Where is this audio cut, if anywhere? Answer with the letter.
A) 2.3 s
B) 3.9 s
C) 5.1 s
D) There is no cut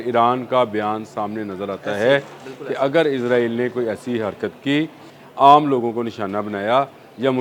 C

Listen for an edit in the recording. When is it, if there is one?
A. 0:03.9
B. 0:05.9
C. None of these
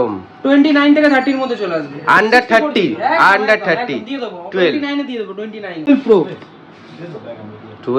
B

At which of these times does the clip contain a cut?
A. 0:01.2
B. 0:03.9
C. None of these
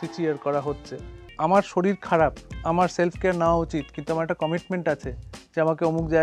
A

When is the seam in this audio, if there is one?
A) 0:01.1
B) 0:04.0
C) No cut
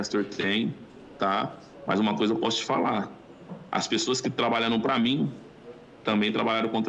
C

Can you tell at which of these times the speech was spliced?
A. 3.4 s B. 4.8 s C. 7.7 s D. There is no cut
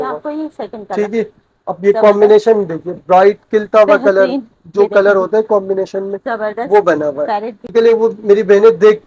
C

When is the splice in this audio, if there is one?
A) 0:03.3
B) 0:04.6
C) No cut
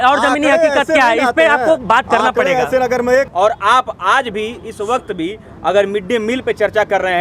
A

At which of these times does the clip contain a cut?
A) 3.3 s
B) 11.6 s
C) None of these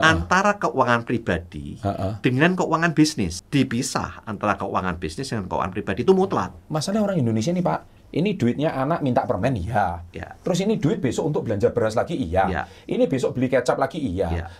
A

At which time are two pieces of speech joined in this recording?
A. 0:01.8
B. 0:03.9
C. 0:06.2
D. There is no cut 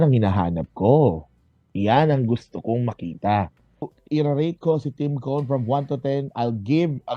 B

